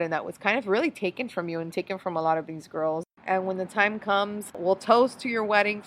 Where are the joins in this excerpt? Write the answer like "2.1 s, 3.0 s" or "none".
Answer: 3.1 s, 4.4 s